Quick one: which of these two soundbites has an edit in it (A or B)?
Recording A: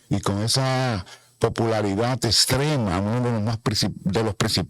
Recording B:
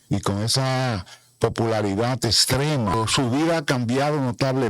B